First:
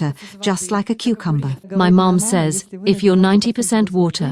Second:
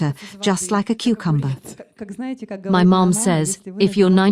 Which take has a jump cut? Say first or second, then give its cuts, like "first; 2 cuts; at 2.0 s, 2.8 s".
first; 1 cut; at 1.6 s